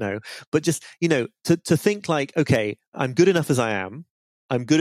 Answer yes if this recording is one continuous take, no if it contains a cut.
no